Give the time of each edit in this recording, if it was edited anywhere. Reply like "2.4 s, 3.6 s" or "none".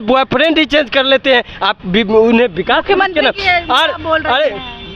none